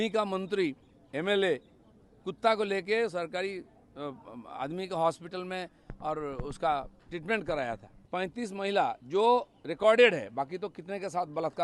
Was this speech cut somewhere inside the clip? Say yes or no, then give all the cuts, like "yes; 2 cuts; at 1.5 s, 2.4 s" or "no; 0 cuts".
yes; 1 cut; at 7.9 s